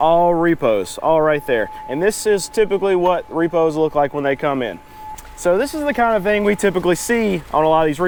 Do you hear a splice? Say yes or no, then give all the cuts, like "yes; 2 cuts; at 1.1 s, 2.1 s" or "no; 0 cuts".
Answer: no; 0 cuts